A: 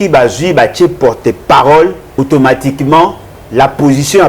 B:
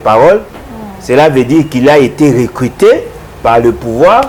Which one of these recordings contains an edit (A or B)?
A